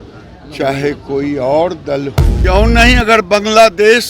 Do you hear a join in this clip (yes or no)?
yes